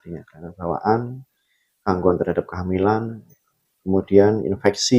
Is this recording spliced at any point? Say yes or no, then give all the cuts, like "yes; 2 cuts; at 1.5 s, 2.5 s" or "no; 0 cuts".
no; 0 cuts